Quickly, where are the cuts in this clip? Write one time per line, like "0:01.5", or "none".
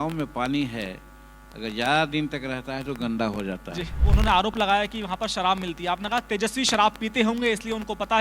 0:03.9